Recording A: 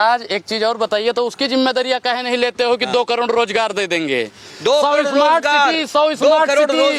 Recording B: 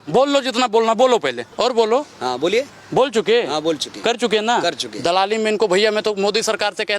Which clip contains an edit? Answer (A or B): B